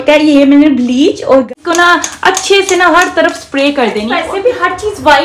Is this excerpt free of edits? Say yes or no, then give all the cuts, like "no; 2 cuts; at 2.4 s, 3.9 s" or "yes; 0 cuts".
no; 2 cuts; at 1.5 s, 4.2 s